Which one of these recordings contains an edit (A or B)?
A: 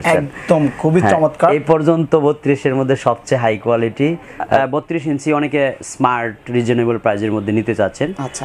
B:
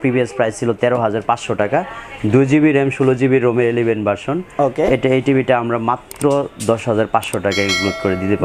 A